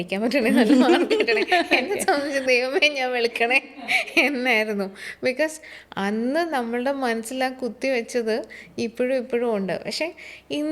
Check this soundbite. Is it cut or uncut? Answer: uncut